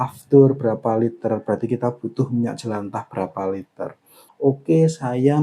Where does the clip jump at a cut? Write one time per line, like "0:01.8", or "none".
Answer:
0:04.2